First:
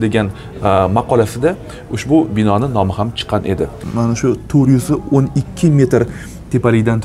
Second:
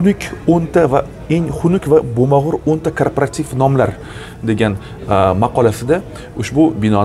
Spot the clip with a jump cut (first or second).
first